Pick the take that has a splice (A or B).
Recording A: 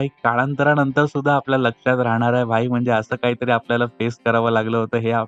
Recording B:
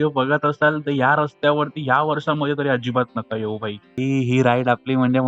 B